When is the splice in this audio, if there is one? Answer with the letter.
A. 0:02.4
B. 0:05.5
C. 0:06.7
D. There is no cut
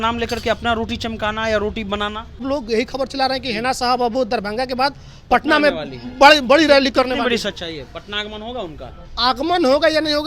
A